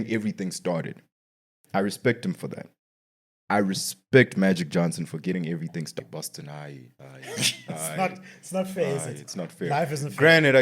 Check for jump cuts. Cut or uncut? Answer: cut